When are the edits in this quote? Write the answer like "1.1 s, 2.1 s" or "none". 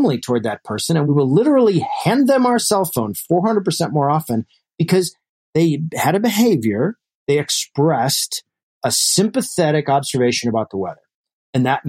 1.0 s